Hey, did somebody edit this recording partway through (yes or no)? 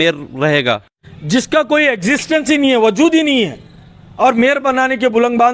yes